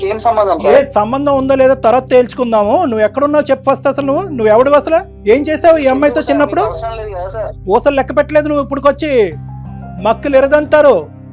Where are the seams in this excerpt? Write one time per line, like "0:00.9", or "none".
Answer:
0:07.6